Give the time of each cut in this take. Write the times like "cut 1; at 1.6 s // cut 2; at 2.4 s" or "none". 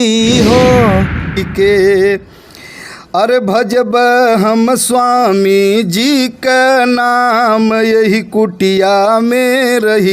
cut 1; at 1.5 s